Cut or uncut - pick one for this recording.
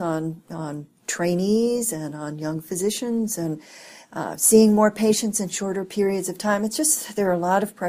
uncut